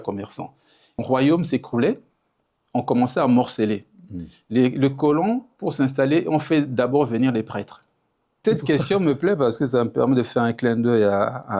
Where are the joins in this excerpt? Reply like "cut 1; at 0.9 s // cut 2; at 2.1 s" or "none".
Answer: cut 1; at 1.0 s // cut 2; at 8.4 s